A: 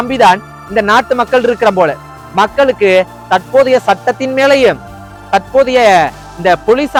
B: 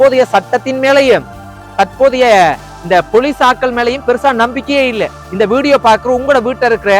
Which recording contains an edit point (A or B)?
B